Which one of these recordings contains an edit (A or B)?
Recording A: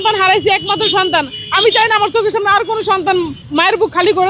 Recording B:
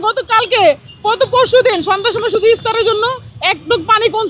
A